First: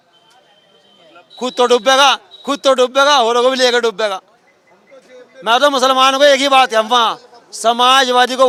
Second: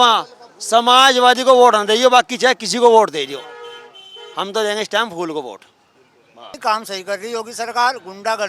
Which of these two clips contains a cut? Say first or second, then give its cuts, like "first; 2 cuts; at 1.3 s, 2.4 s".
second; 1 cut; at 6.6 s